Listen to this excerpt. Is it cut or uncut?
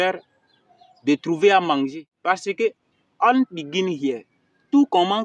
cut